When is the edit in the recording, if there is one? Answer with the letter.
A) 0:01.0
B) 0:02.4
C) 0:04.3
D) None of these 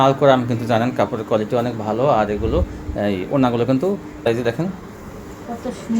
C